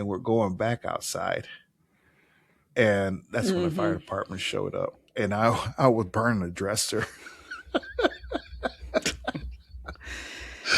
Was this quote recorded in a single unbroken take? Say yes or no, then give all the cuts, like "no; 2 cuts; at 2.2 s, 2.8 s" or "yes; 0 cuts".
yes; 0 cuts